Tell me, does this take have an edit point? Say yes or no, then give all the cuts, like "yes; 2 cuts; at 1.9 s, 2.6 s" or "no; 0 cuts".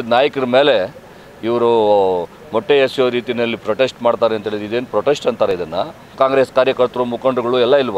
yes; 1 cut; at 6.1 s